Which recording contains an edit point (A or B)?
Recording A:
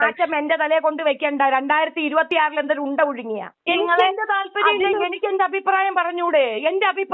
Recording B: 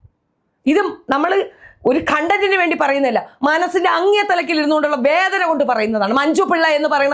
A